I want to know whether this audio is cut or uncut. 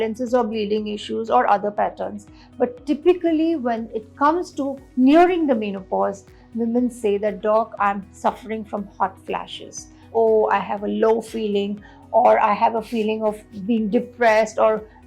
cut